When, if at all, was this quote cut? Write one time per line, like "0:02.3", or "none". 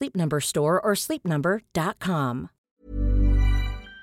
0:02.5